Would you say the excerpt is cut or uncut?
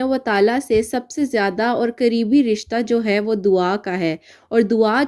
uncut